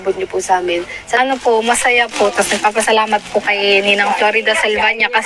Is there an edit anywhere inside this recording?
yes; 1 cut; at 1.0 s

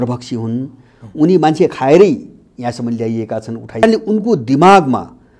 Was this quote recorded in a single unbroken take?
no; 1 cut; at 3.8 s

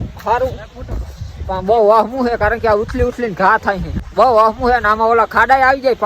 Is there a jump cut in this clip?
yes; 1 cut; at 4.0 s

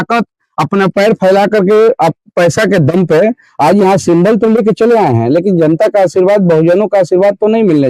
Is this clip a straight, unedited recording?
yes; 0 cuts

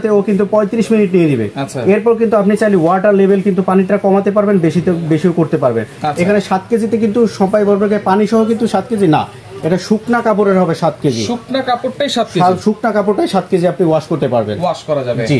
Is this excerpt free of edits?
yes; 0 cuts

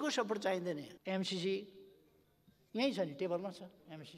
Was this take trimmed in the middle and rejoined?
yes; 1 cut; at 0.9 s

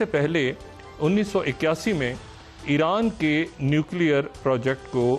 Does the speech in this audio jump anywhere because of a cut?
no; 0 cuts

